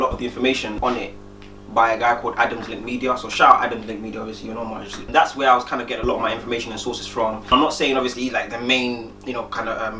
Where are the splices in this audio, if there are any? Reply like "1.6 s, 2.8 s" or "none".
none